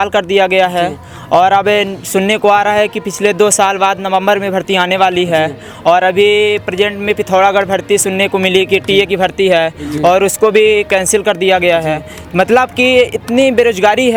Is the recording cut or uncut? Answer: uncut